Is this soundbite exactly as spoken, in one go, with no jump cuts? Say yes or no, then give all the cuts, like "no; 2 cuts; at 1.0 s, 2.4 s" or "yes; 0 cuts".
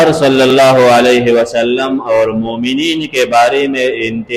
yes; 0 cuts